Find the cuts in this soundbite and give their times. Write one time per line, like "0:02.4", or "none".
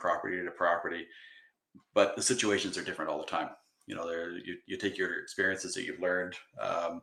none